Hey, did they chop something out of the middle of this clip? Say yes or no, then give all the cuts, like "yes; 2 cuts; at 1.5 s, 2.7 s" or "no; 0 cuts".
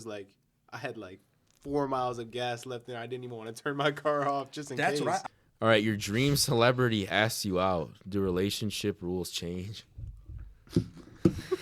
yes; 1 cut; at 5.2 s